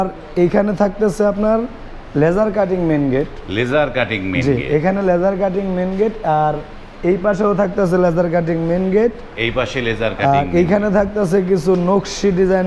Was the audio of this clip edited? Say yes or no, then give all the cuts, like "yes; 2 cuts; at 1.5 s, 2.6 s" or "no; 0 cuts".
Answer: no; 0 cuts